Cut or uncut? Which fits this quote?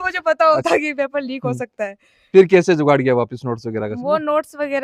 uncut